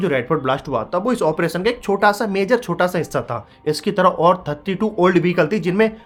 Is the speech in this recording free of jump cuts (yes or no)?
yes